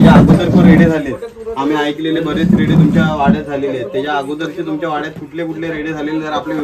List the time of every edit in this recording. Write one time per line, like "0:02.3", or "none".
none